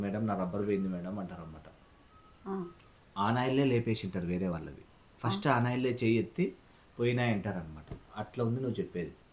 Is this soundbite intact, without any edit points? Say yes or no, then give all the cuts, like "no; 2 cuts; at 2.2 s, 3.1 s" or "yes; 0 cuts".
yes; 0 cuts